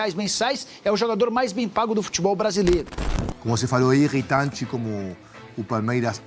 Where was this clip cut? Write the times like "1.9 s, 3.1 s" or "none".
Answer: 3.0 s

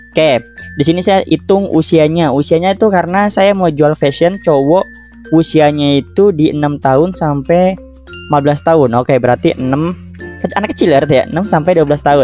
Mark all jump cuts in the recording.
1.3 s

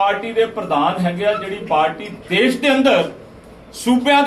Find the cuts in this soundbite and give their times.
none

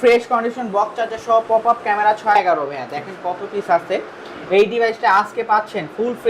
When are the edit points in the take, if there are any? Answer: 2.4 s

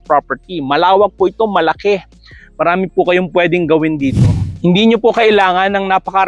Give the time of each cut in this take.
4.5 s

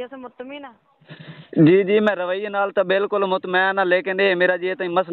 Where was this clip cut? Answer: none

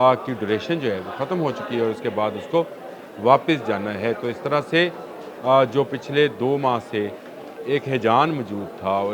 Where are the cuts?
none

